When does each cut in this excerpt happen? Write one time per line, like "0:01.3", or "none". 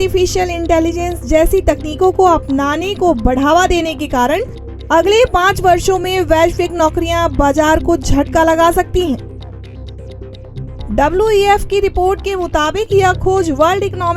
0:09.2
0:10.7